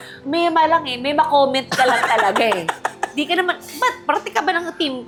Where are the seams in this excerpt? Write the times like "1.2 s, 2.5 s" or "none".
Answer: none